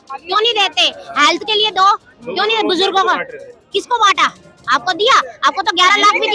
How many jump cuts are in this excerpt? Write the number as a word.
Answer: zero